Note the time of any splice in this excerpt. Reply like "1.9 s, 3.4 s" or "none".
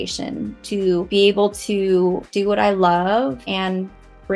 1.1 s, 2.3 s, 3.4 s